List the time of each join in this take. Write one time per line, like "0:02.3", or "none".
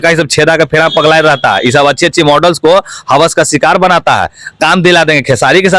none